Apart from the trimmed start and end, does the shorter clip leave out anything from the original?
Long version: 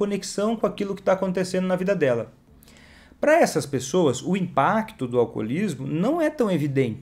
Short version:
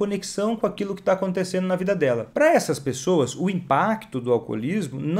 yes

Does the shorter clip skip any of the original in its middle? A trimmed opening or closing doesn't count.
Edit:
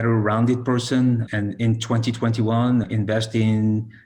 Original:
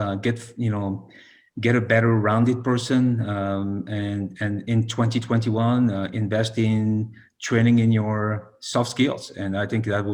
yes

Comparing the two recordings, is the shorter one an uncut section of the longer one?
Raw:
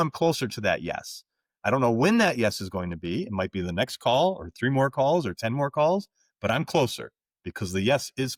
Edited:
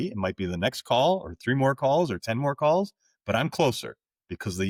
yes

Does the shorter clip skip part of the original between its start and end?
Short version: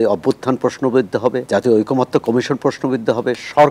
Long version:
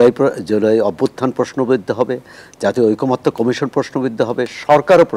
yes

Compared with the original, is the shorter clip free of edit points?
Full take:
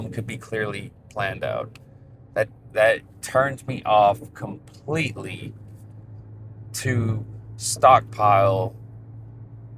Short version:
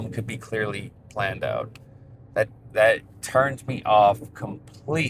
yes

